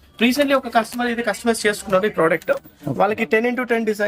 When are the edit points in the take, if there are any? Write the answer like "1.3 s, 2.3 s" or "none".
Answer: none

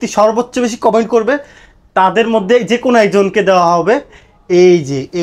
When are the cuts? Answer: none

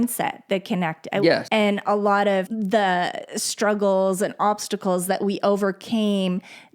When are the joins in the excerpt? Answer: 1.4 s, 2.5 s

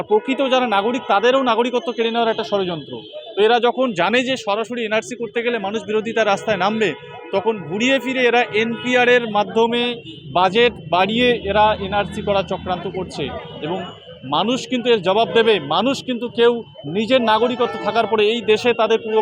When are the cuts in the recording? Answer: none

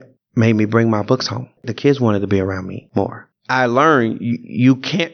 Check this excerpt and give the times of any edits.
1.7 s, 3.1 s

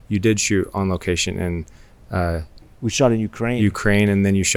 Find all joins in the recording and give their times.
none

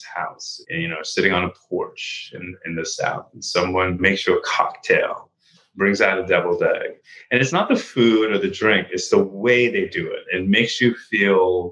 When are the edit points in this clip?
10.3 s

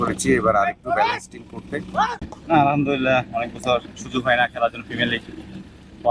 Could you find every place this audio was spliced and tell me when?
2.3 s

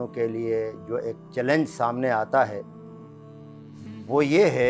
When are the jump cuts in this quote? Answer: none

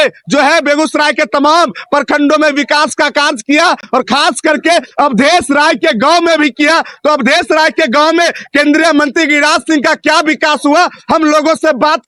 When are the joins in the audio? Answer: none

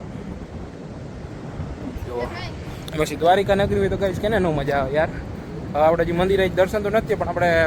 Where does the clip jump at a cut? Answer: none

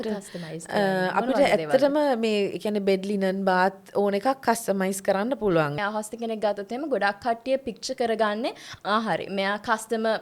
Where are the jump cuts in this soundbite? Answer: 5.8 s

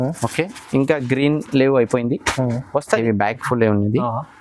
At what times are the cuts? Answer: 2.9 s

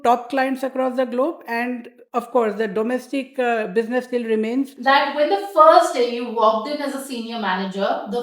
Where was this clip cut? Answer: 4.7 s

